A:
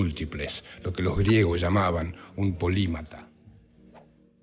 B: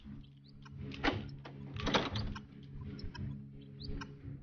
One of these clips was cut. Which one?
B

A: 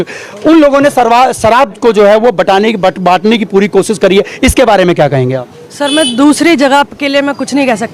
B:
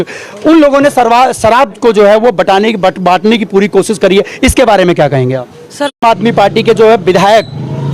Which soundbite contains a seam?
B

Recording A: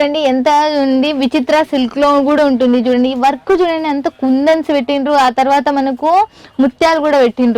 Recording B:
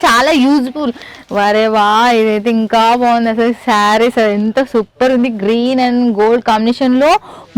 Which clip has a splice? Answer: B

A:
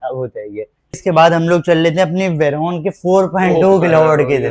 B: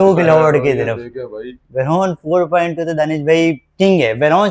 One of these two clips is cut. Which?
A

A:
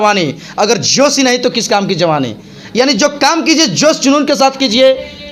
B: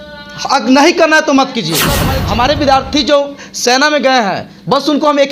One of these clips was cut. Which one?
B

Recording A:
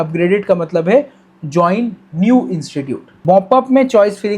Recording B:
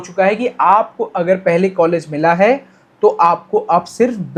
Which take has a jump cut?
A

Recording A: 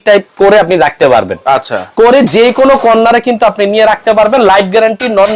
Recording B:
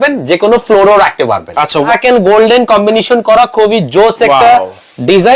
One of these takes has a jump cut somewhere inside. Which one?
B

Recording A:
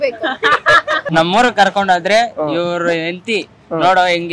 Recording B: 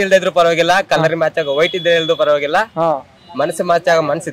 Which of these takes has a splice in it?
A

